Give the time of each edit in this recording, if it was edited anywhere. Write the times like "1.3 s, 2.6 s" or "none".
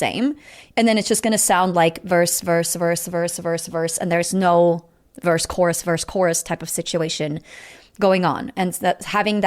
none